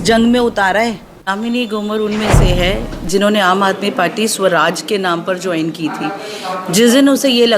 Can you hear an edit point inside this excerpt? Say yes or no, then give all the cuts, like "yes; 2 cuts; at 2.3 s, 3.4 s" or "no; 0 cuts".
yes; 1 cut; at 1.3 s